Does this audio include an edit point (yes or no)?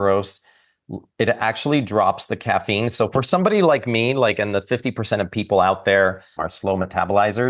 yes